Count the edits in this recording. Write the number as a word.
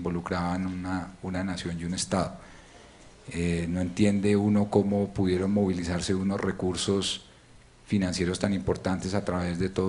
one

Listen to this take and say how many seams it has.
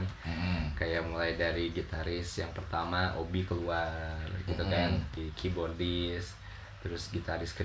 one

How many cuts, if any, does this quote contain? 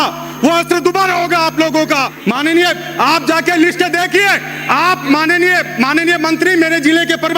one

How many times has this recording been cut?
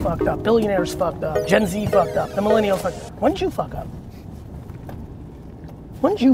one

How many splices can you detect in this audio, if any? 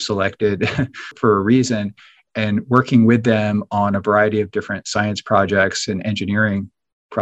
zero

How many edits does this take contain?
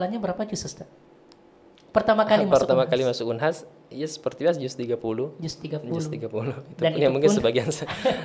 zero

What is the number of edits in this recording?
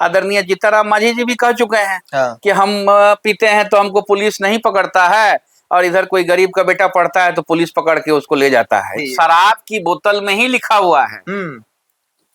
one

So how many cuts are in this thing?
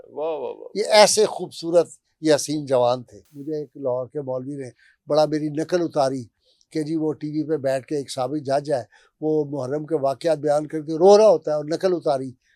one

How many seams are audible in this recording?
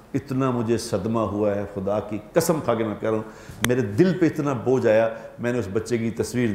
zero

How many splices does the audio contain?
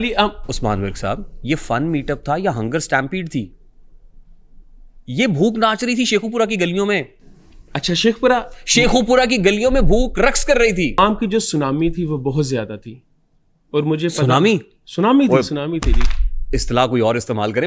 one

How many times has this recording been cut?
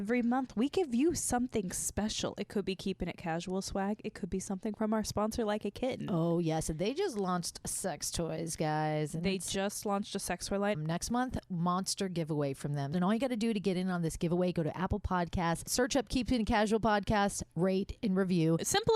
two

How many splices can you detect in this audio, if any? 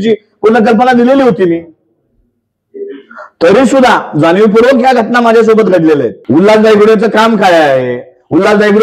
one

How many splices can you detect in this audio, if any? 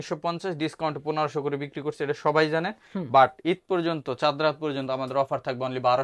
zero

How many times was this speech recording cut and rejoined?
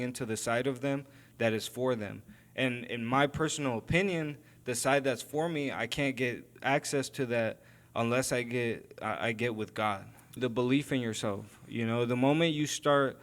one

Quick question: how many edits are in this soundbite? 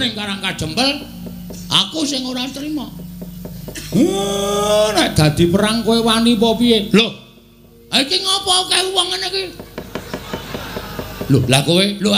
zero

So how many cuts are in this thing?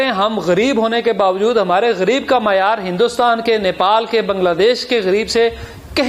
zero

